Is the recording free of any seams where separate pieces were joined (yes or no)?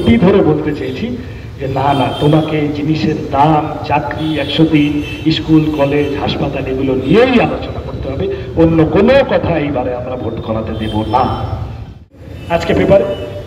no